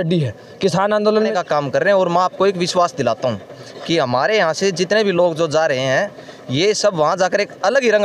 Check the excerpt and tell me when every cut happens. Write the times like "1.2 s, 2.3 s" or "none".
1.3 s